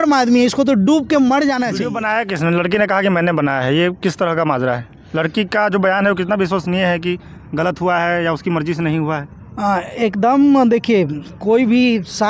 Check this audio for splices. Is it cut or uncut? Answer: cut